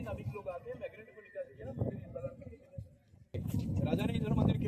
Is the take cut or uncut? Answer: cut